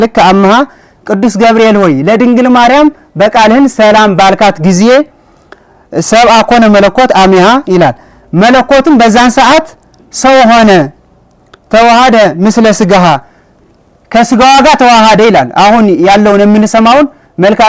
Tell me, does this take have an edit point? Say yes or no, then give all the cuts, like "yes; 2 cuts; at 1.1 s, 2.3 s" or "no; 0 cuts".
no; 0 cuts